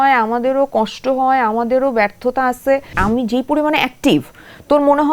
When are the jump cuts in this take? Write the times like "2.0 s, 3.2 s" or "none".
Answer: 2.9 s